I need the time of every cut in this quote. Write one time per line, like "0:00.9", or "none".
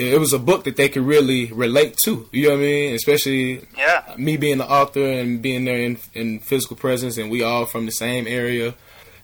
none